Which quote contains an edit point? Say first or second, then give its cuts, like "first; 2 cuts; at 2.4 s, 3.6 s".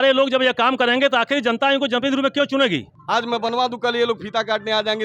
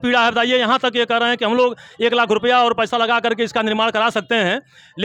first; 1 cut; at 2.9 s